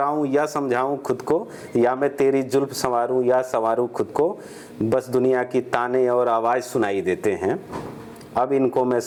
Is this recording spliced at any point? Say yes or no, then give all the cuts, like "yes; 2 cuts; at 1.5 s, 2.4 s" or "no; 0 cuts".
no; 0 cuts